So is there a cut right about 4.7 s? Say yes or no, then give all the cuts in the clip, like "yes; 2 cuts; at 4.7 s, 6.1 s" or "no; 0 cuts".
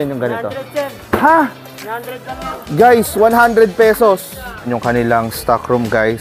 yes; 1 cut; at 4.7 s